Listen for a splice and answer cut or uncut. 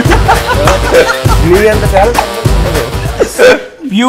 uncut